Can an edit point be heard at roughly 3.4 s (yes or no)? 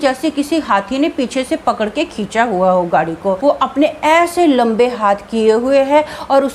yes